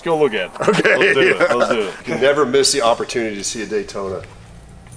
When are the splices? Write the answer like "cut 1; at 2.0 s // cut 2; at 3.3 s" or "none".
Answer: cut 1; at 2.0 s

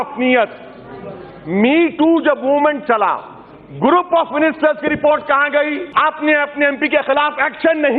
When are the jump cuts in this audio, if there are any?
cut 1; at 5.8 s

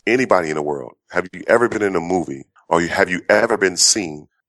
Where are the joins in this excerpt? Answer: none

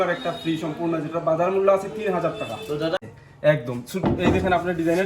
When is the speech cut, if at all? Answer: cut 1; at 3.0 s

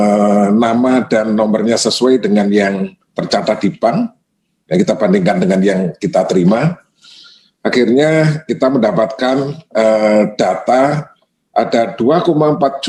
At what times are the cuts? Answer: none

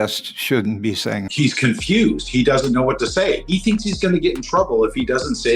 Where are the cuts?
cut 1; at 1.3 s // cut 2; at 3.4 s

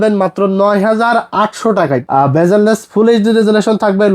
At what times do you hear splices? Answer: cut 1; at 2.0 s

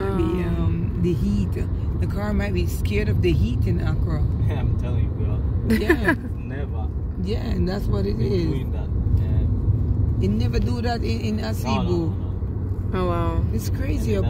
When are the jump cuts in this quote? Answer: none

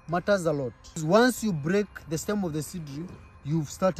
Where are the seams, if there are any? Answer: cut 1; at 1.0 s

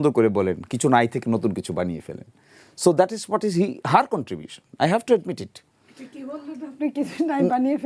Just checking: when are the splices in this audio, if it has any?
none

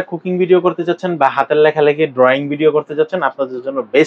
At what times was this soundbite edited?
none

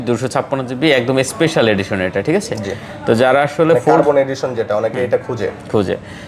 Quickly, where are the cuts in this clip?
none

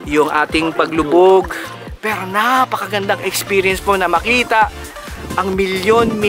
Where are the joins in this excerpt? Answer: cut 1; at 1.6 s

